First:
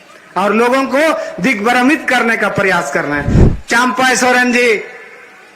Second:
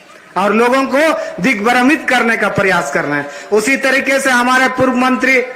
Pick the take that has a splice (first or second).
first